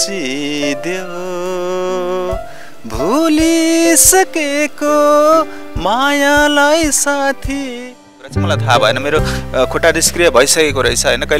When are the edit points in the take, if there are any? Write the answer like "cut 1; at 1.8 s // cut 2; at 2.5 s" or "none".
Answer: cut 1; at 8.4 s

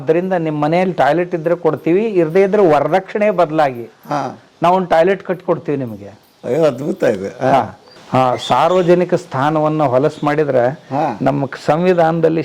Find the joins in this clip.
cut 1; at 8.0 s

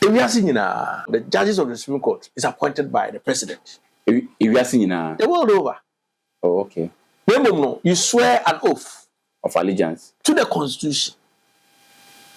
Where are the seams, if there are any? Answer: cut 1; at 1.1 s

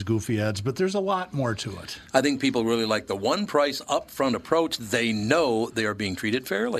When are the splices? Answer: none

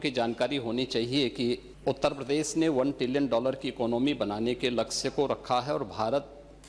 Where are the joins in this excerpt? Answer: cut 1; at 1.7 s

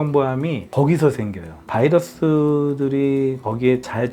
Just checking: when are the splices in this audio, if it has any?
cut 1; at 1.6 s

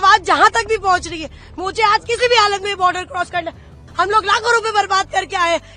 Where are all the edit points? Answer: cut 1; at 3.8 s

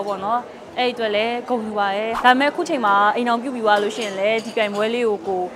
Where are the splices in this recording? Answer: cut 1; at 2.1 s

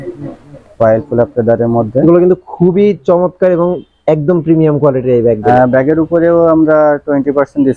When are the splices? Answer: cut 1; at 5.5 s

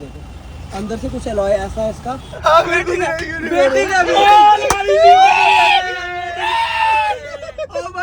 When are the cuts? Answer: cut 1; at 2.4 s

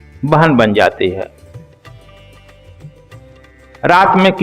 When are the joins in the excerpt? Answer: cut 1; at 1.3 s // cut 2; at 3.4 s

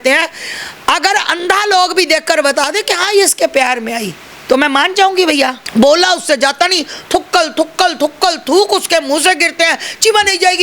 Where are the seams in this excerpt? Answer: cut 1; at 5.6 s

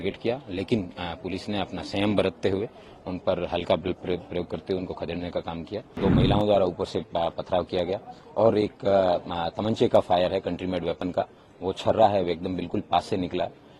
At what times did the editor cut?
cut 1; at 6.0 s

